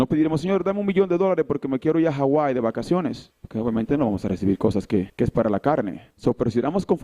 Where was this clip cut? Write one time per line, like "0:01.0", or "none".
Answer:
0:05.1